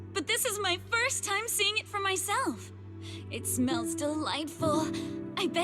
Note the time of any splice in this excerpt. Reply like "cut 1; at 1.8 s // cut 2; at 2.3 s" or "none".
none

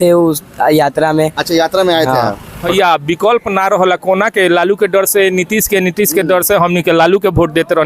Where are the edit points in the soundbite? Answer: cut 1; at 2.6 s

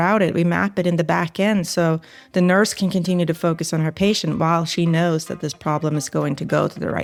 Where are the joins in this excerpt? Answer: none

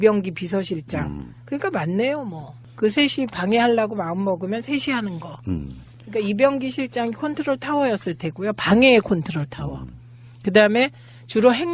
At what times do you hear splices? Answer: cut 1; at 8.4 s

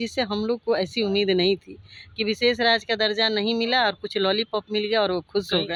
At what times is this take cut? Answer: none

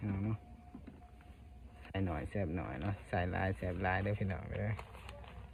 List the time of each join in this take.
none

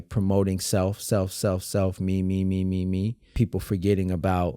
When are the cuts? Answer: cut 1; at 3.3 s

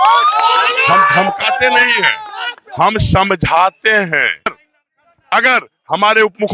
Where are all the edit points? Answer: cut 1; at 4.6 s

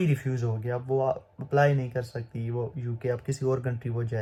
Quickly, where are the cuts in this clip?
none

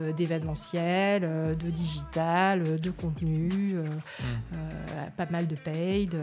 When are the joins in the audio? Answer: none

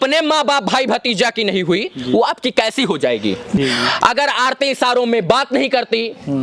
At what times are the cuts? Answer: cut 1; at 3.6 s

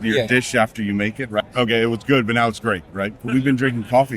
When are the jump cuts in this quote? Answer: cut 1; at 1.4 s // cut 2; at 3.3 s

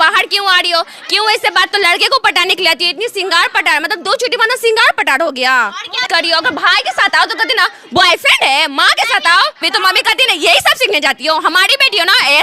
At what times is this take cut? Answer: cut 1; at 1.7 s // cut 2; at 6.0 s // cut 3; at 9.7 s

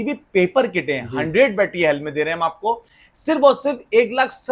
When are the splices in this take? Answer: none

